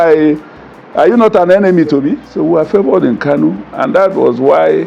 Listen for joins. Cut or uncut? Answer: cut